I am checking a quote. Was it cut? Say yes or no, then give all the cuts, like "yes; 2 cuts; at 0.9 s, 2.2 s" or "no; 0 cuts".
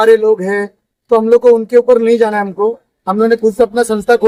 no; 0 cuts